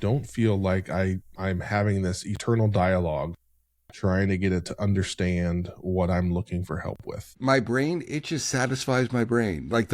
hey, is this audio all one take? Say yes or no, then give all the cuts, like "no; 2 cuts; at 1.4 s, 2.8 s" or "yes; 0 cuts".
no; 1 cut; at 7.3 s